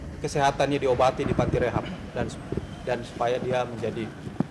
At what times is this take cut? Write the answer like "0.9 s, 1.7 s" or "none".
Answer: none